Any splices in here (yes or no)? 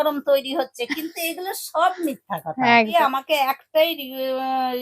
yes